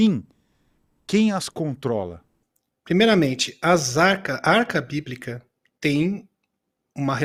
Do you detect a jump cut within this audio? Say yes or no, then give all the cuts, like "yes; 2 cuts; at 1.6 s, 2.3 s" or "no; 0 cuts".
no; 0 cuts